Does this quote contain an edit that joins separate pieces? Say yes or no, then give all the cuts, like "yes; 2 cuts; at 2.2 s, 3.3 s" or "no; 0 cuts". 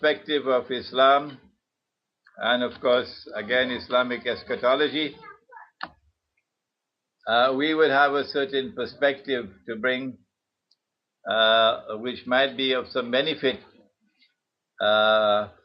yes; 1 cut; at 1.1 s